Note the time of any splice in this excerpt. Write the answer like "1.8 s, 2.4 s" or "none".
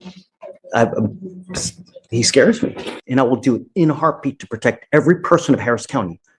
2.9 s